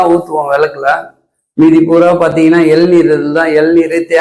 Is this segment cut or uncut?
uncut